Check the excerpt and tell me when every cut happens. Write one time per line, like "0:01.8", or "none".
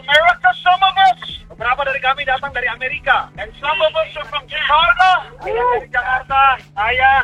none